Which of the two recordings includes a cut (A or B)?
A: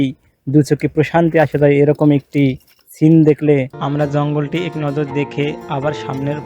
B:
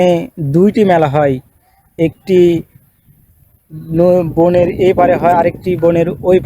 A